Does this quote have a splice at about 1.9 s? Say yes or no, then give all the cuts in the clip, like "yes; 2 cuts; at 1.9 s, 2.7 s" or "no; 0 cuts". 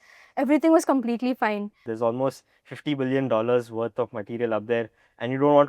yes; 1 cut; at 1.9 s